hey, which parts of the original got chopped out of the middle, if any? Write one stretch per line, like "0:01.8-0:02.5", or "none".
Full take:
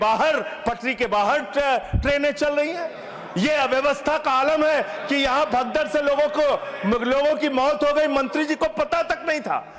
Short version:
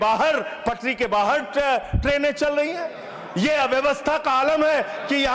none